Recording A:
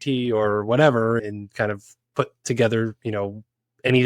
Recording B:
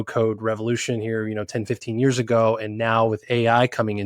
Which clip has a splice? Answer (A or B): A